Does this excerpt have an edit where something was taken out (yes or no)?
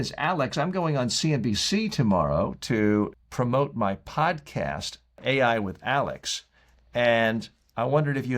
yes